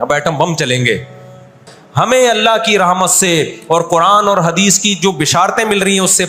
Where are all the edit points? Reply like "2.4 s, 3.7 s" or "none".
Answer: 1.8 s